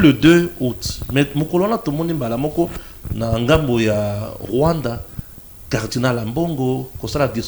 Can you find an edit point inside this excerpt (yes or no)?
no